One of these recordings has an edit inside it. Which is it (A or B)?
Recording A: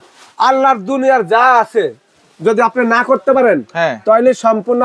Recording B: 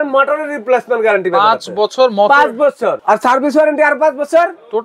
B